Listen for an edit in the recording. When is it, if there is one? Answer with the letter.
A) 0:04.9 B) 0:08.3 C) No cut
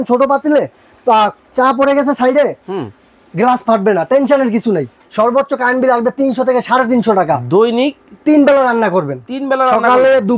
A